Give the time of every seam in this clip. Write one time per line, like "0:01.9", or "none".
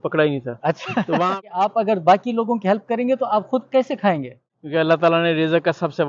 0:01.3
0:04.4